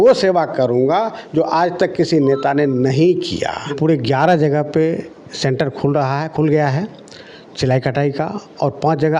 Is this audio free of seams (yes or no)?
no